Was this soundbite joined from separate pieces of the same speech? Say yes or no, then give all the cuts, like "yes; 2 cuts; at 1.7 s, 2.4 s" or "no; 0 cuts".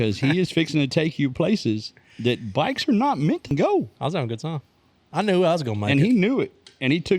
yes; 1 cut; at 3.5 s